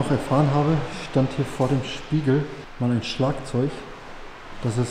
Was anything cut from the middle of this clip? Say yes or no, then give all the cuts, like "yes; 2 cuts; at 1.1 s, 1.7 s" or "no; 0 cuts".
no; 0 cuts